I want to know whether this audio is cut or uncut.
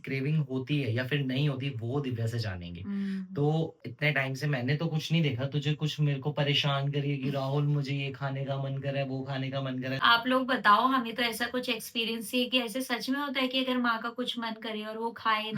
cut